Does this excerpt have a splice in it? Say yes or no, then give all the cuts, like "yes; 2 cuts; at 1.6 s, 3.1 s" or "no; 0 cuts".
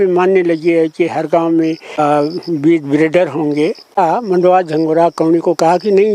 yes; 2 cuts; at 1.9 s, 3.9 s